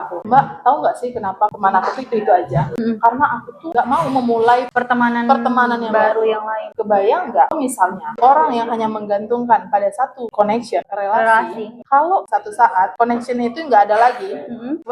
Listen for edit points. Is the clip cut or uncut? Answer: uncut